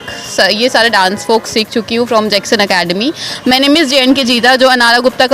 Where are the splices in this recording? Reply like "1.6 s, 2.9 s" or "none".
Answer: 3.3 s